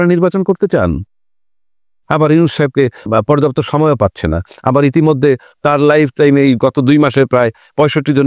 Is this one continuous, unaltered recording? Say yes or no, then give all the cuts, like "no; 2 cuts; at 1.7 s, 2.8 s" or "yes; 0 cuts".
yes; 0 cuts